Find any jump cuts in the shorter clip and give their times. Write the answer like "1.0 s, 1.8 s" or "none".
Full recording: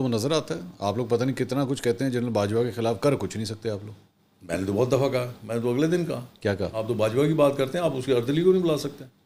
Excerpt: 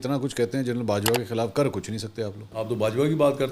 2.5 s